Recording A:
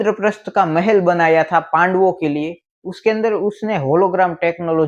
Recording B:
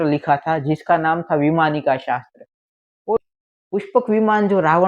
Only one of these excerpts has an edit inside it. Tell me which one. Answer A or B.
B